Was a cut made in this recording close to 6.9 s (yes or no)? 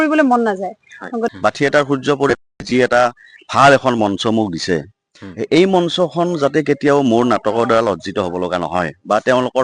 no